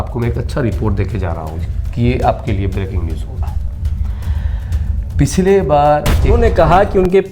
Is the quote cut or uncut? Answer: cut